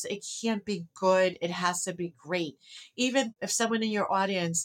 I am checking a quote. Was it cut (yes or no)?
yes